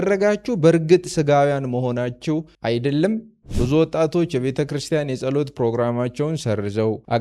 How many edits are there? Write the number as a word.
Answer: two